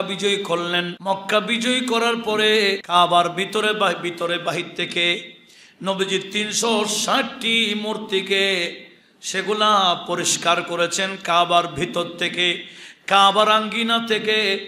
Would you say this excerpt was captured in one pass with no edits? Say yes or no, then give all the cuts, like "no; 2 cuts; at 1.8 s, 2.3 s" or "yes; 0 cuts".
no; 2 cuts; at 1.0 s, 2.8 s